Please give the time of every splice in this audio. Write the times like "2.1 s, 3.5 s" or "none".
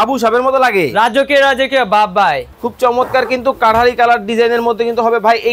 2.5 s